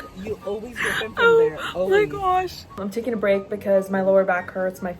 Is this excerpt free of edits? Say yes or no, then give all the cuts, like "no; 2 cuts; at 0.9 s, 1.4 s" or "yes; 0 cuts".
no; 1 cut; at 2.8 s